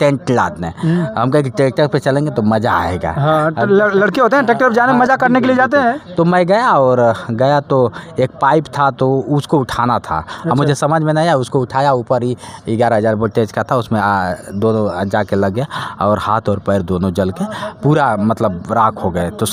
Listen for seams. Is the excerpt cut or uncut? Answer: uncut